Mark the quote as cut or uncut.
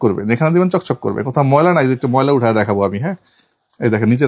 uncut